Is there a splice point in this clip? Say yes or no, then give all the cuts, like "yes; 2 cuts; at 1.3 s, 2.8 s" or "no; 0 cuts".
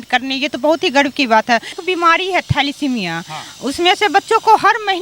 yes; 1 cut; at 1.7 s